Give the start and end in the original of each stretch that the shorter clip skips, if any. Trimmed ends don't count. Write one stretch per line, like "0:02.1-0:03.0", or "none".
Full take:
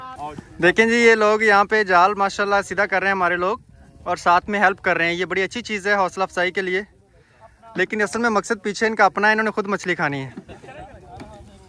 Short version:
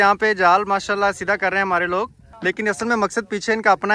0:03.7-0:07.6